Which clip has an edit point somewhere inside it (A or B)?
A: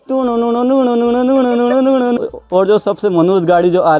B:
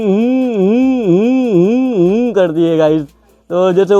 A